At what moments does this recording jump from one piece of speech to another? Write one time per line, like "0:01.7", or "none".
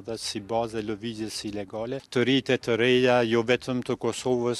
0:02.0